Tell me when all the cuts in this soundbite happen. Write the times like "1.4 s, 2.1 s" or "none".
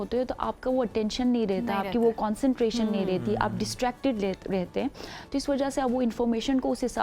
none